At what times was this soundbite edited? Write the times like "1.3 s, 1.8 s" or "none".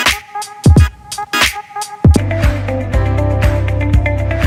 none